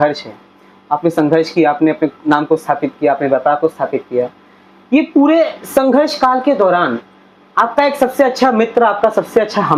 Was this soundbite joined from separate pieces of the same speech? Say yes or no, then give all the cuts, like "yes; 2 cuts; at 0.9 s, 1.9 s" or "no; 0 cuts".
no; 0 cuts